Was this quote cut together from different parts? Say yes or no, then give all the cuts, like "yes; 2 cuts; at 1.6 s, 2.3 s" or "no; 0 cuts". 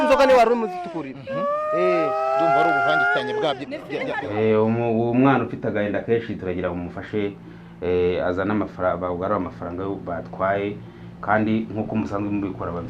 yes; 1 cut; at 4.2 s